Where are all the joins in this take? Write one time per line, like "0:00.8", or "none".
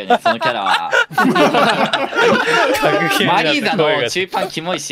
none